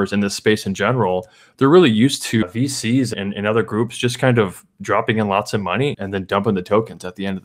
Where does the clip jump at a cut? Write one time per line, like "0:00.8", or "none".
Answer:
0:03.1
0:06.0